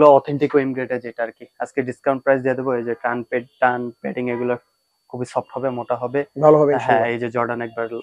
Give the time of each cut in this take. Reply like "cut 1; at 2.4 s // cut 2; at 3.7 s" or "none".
none